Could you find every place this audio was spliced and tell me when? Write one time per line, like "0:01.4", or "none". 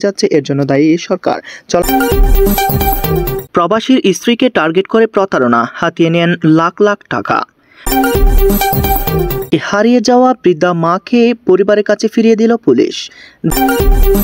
0:01.8
0:03.4
0:07.9
0:09.5
0:13.3